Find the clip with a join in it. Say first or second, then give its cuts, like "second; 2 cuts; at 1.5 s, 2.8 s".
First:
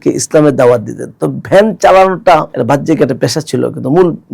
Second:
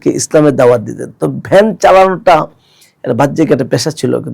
first; 1 cut; at 2.5 s